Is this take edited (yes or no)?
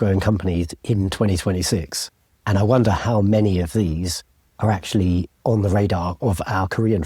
no